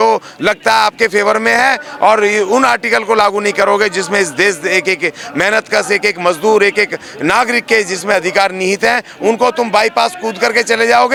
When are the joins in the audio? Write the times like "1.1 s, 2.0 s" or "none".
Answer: none